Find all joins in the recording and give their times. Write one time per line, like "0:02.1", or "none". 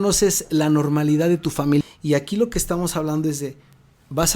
0:01.8